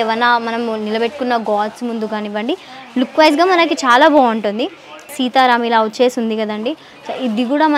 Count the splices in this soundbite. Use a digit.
0